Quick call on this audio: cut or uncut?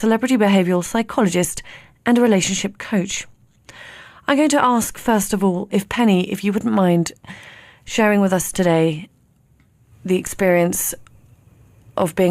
cut